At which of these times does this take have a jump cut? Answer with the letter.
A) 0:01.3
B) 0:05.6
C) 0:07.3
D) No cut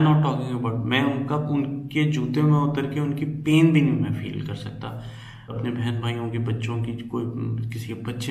B